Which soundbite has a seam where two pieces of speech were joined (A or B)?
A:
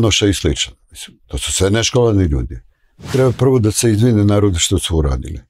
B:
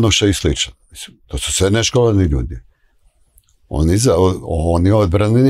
A